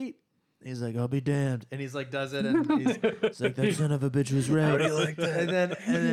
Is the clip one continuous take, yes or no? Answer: yes